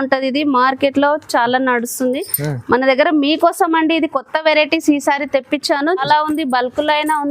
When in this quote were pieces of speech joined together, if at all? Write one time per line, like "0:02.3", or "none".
0:06.0